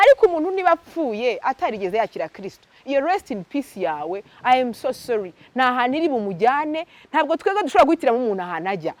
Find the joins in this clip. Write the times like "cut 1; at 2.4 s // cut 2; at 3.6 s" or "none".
none